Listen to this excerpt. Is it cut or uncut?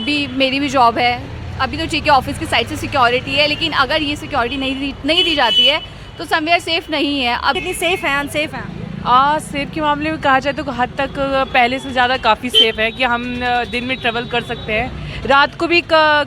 uncut